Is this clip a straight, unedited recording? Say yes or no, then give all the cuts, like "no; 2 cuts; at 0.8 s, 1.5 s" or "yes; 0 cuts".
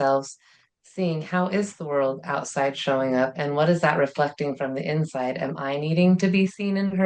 yes; 0 cuts